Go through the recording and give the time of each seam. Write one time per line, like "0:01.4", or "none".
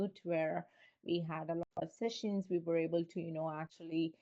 none